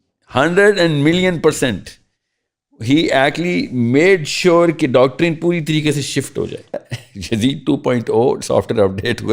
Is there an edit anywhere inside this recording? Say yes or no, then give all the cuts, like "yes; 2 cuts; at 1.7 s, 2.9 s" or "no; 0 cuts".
yes; 1 cut; at 6.8 s